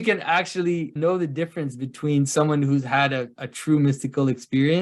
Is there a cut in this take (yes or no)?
yes